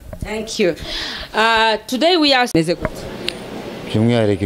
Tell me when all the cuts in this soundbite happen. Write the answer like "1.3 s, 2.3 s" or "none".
2.6 s